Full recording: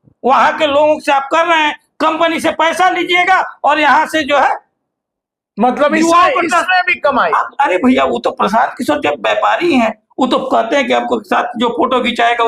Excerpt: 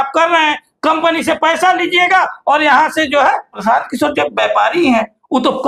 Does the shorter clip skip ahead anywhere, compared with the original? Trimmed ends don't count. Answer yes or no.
yes